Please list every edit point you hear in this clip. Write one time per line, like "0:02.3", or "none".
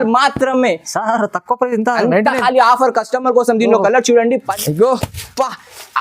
0:04.5